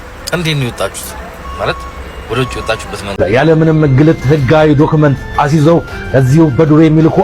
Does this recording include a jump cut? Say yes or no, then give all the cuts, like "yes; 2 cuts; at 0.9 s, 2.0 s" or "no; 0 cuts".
yes; 1 cut; at 3.1 s